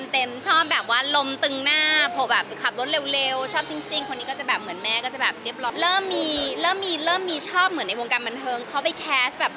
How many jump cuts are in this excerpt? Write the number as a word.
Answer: one